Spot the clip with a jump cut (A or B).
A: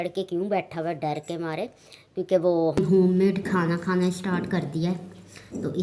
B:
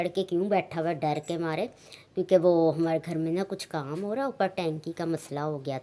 A